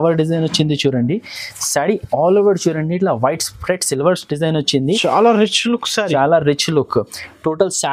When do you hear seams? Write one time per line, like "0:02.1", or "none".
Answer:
none